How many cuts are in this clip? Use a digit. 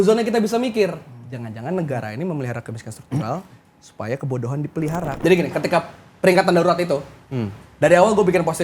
1